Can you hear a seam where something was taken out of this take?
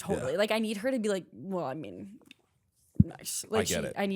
no; 0 cuts

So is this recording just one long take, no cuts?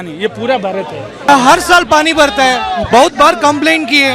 no; 1 cut; at 1.3 s

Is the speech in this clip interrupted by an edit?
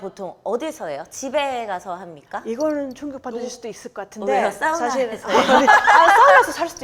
no; 0 cuts

